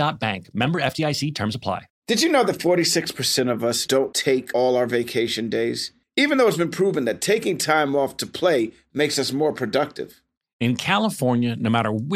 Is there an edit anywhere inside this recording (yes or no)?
yes